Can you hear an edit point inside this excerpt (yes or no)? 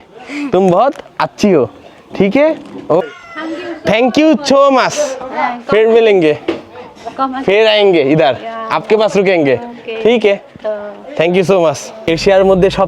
yes